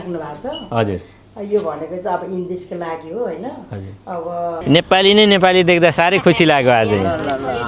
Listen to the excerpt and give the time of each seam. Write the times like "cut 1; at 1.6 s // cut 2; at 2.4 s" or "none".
cut 1; at 4.5 s